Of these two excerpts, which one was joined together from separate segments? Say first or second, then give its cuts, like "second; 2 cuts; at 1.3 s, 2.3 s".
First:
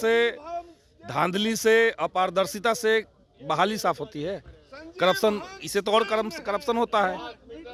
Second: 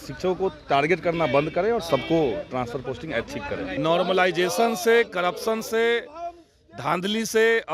second; 1 cut; at 3.8 s